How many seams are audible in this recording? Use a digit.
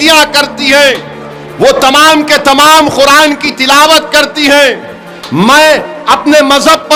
0